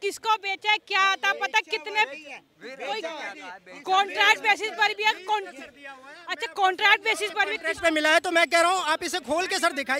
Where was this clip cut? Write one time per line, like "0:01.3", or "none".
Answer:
0:07.6